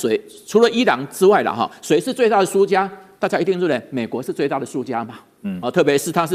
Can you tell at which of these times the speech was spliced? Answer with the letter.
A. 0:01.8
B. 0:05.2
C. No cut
C